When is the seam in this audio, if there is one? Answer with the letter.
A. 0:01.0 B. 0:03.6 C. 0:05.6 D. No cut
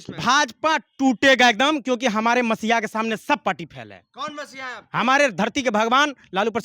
D